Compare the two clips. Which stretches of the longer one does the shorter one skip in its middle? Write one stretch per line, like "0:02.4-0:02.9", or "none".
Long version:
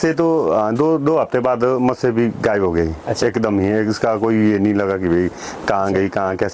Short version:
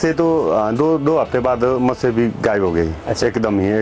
none